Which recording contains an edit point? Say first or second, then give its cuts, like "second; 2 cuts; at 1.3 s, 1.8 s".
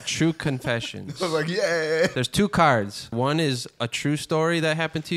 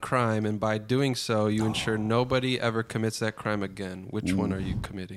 first; 2 cuts; at 2.1 s, 3.1 s